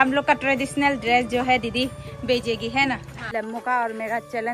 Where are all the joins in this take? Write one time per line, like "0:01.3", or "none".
0:03.1